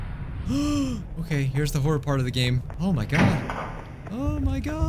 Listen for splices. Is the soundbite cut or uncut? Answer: cut